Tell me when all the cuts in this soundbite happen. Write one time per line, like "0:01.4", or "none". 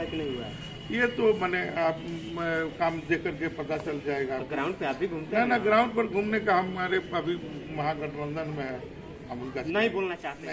none